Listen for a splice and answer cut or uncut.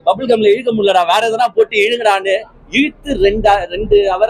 uncut